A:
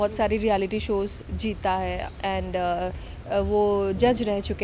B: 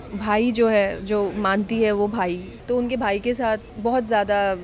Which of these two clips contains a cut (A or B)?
B